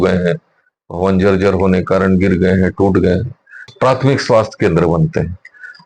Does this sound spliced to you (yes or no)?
yes